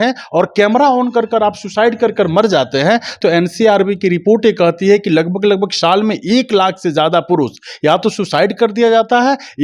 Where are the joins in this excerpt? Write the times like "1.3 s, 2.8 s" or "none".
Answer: 3.2 s